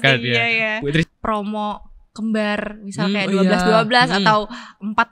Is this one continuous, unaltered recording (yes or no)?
no